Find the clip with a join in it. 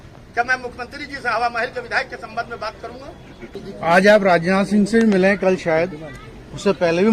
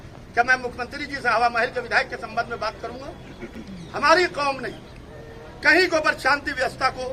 first; 1 cut; at 3.6 s

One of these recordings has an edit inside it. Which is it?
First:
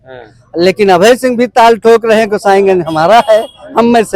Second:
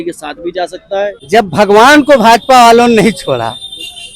second; 1 cut; at 1.2 s

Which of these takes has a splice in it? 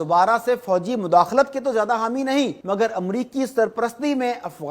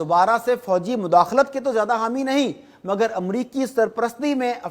first; 1 cut; at 2.6 s

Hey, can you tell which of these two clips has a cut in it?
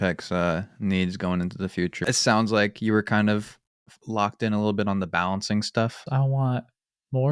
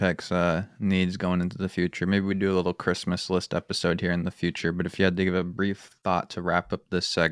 first; 2 cuts; at 2.0 s, 6.0 s

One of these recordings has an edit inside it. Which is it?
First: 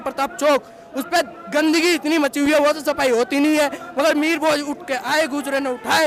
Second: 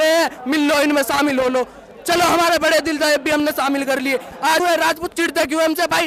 second; 1 cut; at 4.6 s

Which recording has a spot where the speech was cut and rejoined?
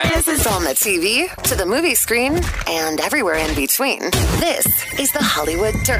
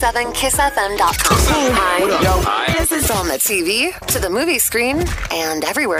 second; 1 cut; at 1.4 s

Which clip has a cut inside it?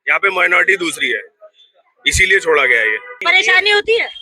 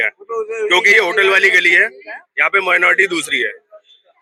first; 1 cut; at 3.1 s

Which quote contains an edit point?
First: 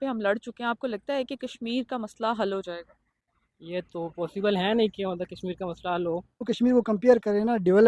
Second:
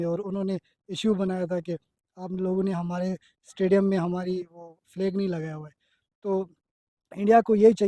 first; 1 cut; at 6.5 s

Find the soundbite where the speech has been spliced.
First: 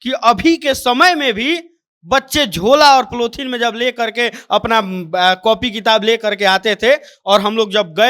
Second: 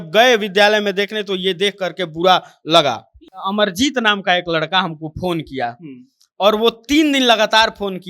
second; 1 cut; at 3.3 s

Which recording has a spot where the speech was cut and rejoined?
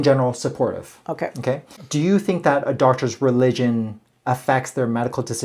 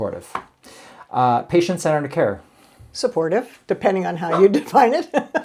first; 1 cut; at 1.7 s

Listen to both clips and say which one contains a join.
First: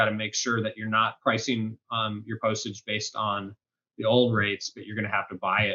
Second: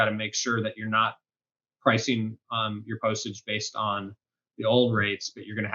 first; 1 cut; at 1.2 s

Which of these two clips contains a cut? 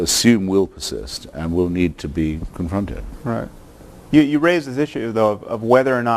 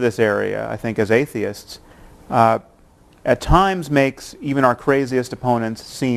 first; 1 cut; at 5.1 s

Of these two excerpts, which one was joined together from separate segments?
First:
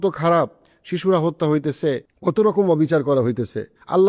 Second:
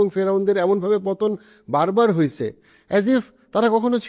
first; 1 cut; at 2.1 s

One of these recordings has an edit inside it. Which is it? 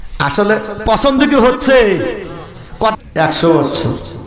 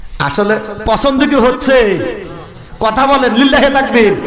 first; 1 cut; at 2.9 s

